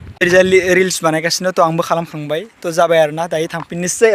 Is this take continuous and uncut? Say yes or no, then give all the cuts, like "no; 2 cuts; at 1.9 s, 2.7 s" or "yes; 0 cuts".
yes; 0 cuts